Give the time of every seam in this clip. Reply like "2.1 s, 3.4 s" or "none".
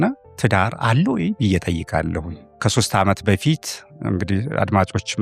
2.6 s